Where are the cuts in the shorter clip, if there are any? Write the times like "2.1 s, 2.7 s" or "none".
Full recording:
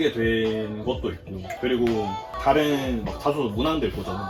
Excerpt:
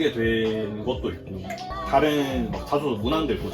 1.6 s